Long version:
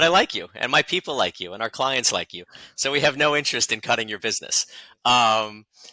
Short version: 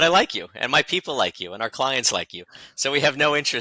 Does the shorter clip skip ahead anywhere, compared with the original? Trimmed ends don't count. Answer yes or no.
no